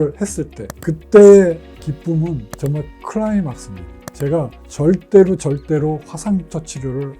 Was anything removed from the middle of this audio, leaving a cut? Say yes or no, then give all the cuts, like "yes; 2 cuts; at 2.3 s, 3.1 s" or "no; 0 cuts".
yes; 1 cut; at 4.6 s